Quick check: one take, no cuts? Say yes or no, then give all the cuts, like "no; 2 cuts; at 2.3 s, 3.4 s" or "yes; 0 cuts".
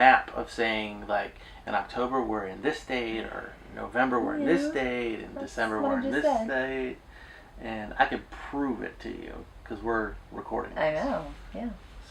yes; 0 cuts